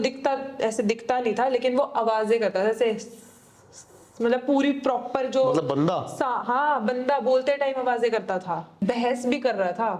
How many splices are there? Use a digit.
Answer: 1